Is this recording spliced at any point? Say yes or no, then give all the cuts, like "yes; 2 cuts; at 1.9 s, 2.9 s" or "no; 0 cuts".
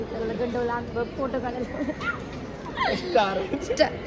no; 0 cuts